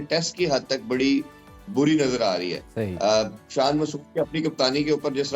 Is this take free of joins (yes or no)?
yes